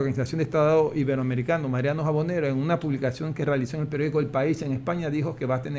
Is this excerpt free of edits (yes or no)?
yes